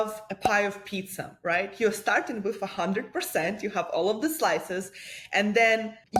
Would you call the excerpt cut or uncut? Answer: uncut